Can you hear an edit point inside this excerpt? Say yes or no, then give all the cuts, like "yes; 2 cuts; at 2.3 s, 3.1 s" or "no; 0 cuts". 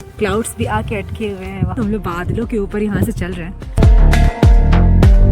yes; 2 cuts; at 1.8 s, 3.8 s